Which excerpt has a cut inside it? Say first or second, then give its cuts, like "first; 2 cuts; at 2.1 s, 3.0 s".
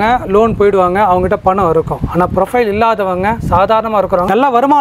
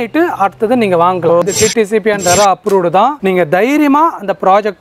second; 1 cut; at 1.4 s